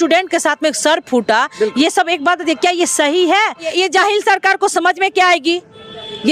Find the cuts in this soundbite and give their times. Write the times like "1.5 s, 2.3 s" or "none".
3.7 s